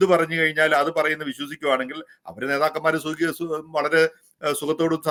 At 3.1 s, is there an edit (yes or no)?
no